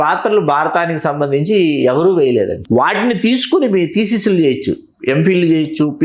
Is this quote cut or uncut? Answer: cut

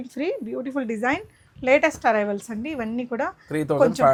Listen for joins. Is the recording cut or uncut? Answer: uncut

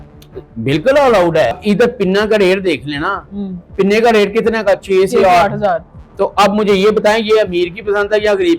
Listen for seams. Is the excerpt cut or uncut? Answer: cut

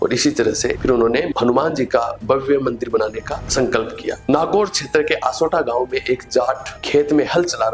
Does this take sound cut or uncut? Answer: cut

